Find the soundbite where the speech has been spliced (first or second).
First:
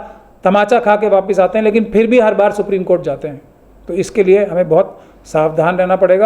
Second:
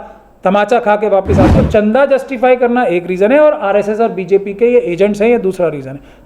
second